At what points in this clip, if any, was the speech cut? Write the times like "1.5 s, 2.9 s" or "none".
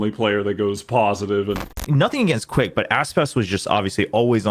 1.8 s